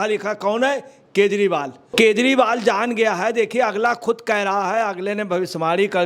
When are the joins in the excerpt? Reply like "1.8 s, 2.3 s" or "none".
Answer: 1.9 s